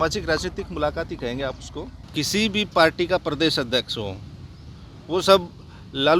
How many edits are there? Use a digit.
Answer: 1